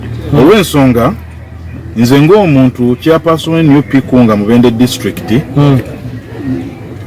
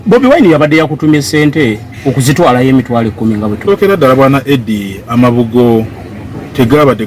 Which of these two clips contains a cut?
second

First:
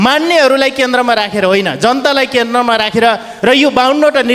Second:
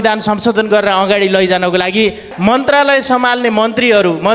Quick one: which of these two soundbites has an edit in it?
second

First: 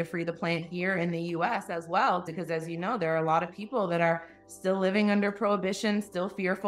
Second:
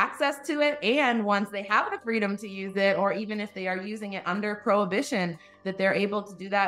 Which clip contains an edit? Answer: first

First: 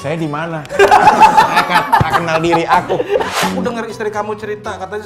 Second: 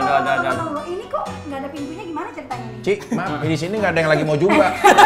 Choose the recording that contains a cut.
first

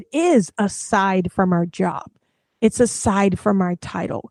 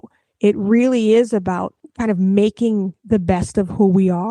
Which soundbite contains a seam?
second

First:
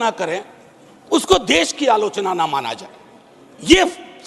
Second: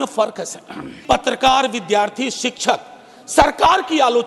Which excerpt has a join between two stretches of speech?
second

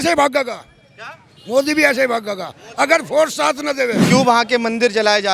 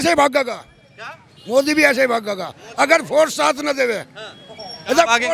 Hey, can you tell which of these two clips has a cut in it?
first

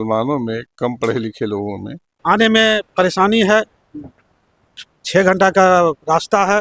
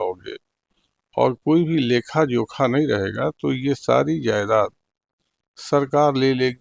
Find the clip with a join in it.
first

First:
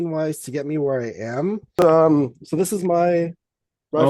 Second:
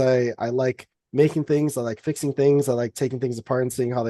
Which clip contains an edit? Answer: first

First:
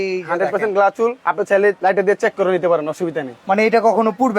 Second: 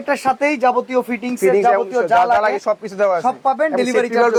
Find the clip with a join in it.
first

